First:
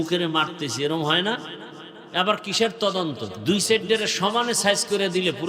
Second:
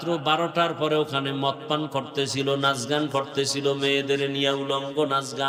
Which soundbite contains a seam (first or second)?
first